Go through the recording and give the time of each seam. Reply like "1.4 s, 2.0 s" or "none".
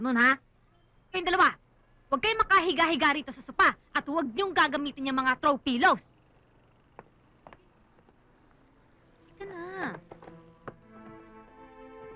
11.0 s